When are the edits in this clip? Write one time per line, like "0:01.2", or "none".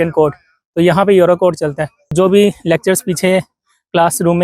0:02.1